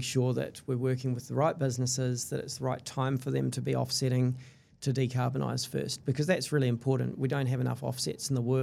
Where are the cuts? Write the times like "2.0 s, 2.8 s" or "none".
4.5 s